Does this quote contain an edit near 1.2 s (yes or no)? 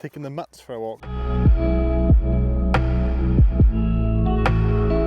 yes